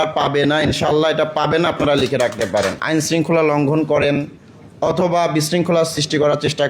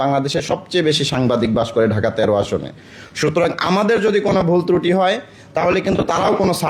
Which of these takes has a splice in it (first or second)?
first